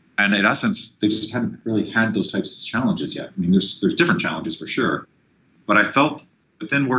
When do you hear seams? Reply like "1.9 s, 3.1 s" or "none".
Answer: 1.3 s